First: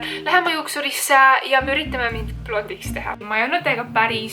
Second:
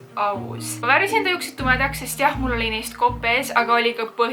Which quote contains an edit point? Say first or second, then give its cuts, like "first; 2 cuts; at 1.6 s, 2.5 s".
first; 1 cut; at 3.2 s